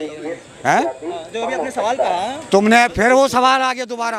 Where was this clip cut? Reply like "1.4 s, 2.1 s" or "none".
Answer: none